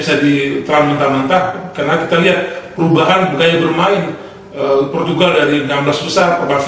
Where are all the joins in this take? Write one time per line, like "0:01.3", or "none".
0:03.6